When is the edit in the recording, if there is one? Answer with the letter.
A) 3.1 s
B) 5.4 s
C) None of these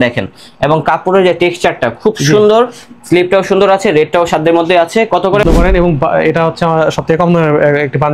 B